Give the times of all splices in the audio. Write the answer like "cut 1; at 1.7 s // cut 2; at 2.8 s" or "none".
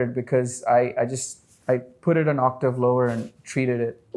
none